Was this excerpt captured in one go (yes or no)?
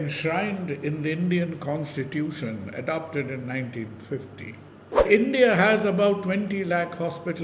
no